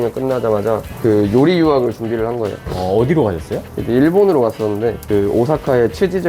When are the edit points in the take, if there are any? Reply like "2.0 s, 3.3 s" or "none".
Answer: 0.9 s, 2.6 s, 5.0 s